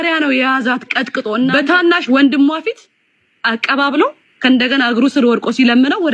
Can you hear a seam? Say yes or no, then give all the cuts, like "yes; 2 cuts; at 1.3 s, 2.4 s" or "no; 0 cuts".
yes; 1 cut; at 1.5 s